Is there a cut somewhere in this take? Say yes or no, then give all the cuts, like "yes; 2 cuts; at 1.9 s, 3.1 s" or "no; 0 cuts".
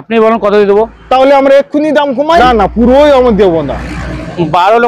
yes; 1 cut; at 2.4 s